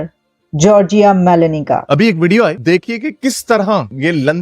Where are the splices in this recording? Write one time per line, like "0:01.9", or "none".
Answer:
0:01.9